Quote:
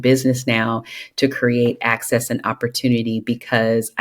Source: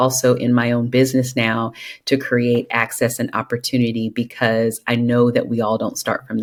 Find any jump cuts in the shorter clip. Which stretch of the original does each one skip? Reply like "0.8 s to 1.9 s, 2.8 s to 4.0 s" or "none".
none